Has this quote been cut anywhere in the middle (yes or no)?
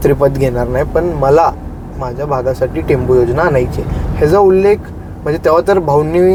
no